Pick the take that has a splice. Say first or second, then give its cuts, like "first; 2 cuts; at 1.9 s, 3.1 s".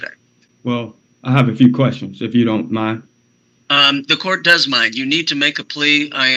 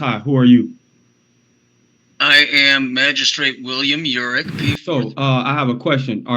second; 1 cut; at 4.8 s